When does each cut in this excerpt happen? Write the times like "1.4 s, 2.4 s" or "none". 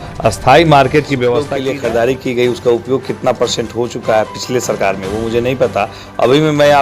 1.5 s

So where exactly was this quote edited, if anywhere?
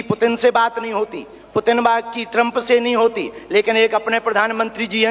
none

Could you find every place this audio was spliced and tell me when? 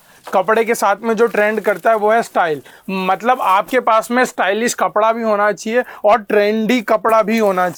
none

